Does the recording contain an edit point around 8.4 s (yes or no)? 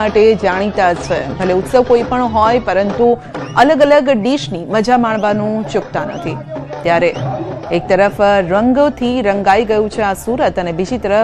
no